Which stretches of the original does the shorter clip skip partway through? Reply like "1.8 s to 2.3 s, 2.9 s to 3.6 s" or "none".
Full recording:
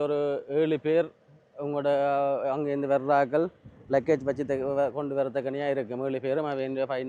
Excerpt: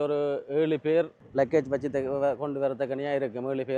1.2 s to 3.7 s